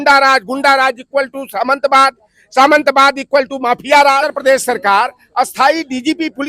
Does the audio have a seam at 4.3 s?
yes; 1 cut; at 4.3 s

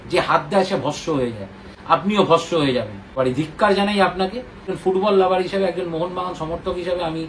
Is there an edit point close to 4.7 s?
yes; 2 cuts; at 3.2 s, 4.7 s

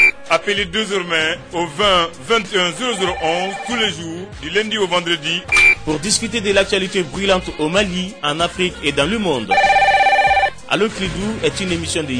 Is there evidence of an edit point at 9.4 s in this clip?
no; 0 cuts

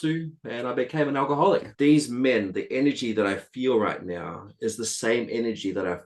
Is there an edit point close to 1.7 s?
yes; 1 cut; at 1.7 s

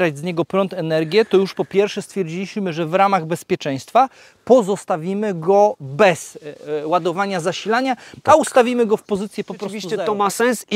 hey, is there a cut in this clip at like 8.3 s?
no; 1 cut; at 9.9 s

